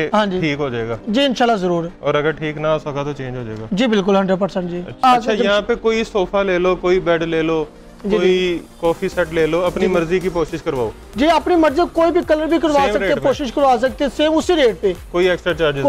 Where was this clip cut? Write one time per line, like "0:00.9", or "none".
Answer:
0:05.0

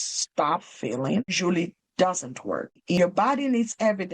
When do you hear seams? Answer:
0:01.4
0:02.8

